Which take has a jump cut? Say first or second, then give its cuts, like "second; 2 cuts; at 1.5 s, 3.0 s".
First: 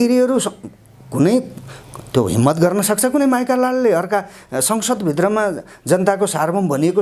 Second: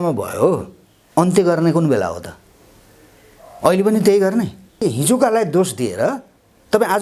second; 1 cut; at 4.8 s